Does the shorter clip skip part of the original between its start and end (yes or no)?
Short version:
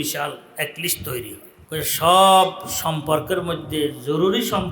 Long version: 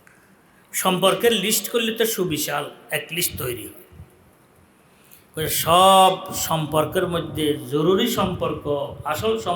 yes